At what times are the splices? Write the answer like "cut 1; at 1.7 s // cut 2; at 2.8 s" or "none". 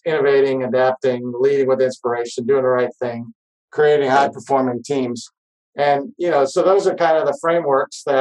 none